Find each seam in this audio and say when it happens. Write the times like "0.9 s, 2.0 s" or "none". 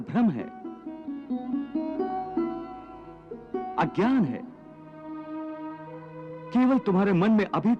none